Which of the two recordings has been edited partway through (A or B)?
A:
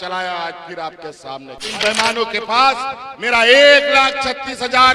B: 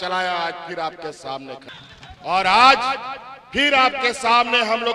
A